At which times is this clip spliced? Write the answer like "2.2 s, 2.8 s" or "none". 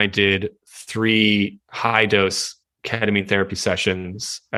none